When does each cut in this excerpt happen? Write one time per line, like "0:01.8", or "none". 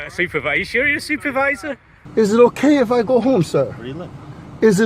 0:01.9

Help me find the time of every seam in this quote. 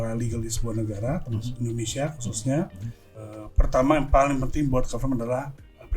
0:03.1

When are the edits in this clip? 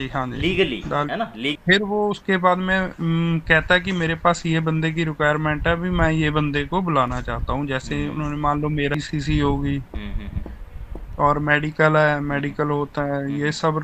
0:01.5
0:08.9

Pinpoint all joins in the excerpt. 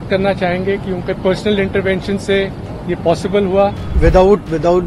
0:03.9

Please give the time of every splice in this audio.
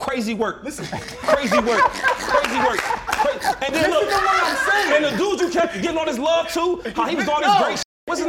none

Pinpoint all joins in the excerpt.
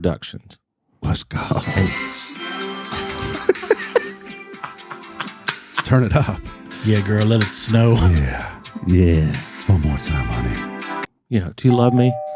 0:11.1

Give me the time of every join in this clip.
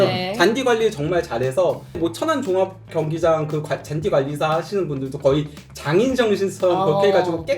0:02.0

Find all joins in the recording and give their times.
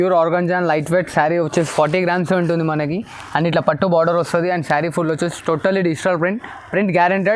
none

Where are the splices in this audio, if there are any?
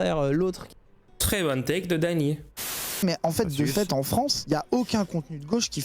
0:02.9

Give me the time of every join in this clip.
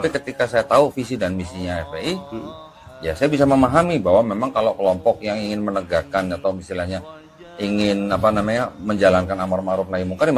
none

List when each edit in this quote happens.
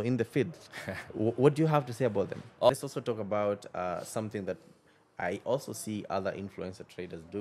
0:02.7

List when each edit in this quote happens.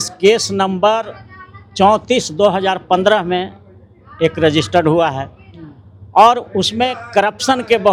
none

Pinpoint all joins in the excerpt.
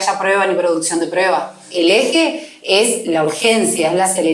0:01.6

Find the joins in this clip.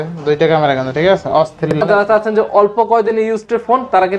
0:01.8

